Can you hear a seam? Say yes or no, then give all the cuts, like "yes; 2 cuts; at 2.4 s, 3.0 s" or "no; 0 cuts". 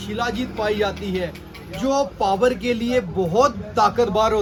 no; 0 cuts